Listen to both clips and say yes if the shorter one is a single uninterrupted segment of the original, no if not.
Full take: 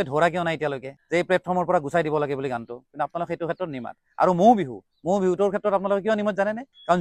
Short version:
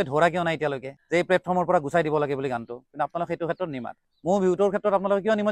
no